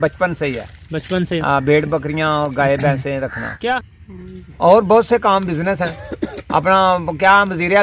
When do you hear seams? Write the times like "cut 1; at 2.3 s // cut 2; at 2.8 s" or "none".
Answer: cut 1; at 3.8 s